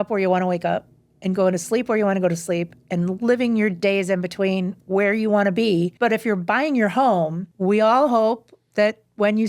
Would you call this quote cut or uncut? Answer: cut